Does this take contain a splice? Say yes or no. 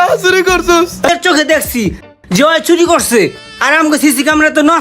yes